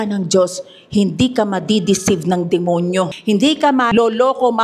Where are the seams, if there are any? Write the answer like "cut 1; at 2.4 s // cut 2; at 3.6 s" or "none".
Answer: cut 1; at 3.2 s // cut 2; at 3.9 s